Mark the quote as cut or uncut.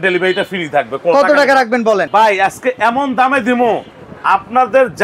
cut